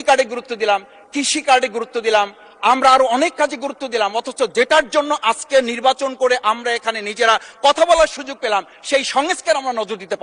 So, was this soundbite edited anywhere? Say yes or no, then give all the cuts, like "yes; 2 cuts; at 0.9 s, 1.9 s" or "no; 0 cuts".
no; 0 cuts